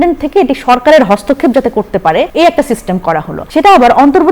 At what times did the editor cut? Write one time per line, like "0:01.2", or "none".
0:02.3
0:03.4